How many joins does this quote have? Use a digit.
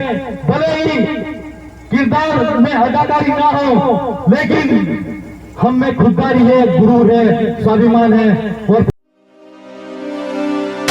1